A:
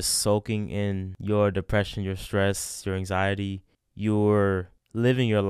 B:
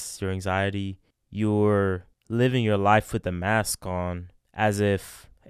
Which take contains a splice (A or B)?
A